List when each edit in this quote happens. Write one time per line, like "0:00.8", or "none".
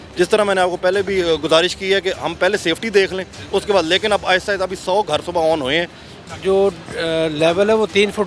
0:06.2